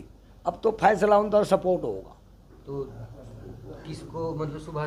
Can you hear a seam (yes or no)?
no